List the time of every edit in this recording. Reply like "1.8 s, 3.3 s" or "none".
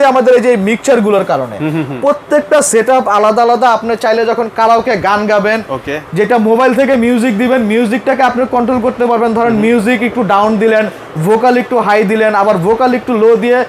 none